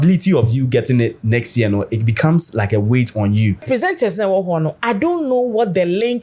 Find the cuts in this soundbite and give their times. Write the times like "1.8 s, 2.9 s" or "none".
3.6 s